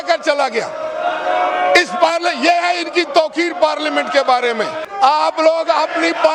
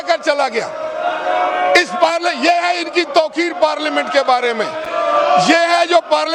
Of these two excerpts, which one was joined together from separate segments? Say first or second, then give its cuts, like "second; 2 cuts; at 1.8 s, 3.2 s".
first; 1 cut; at 4.8 s